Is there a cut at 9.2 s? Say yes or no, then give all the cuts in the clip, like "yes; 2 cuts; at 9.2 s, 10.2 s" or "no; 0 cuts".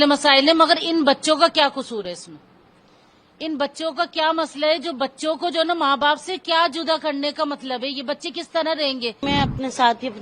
yes; 1 cut; at 9.2 s